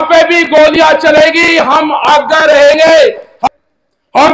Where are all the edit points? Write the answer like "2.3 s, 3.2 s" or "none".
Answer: 3.3 s